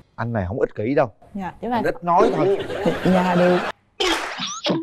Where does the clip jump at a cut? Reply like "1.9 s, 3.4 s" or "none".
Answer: 3.7 s